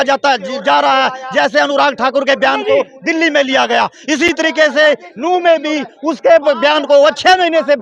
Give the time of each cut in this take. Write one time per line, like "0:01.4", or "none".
none